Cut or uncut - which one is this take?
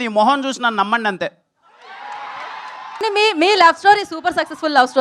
cut